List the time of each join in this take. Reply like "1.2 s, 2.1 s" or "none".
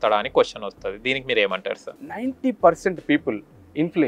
1.8 s